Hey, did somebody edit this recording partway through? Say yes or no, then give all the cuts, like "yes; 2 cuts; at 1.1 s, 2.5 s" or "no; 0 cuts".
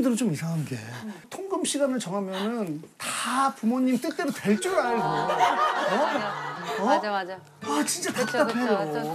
yes; 1 cut; at 1.4 s